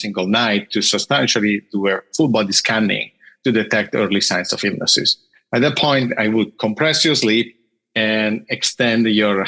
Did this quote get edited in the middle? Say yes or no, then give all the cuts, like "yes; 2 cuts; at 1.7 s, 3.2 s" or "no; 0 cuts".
no; 0 cuts